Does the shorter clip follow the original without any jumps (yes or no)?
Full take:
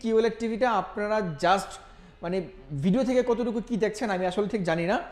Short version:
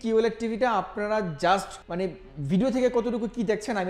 no